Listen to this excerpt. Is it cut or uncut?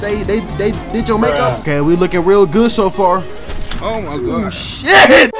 cut